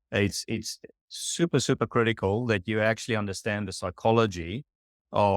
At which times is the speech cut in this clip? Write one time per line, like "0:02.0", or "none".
none